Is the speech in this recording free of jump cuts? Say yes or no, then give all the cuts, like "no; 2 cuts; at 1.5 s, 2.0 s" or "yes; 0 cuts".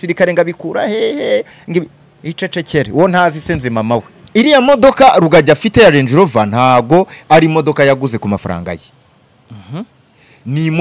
no; 1 cut; at 4.2 s